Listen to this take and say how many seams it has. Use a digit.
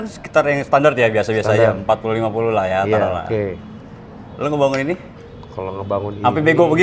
0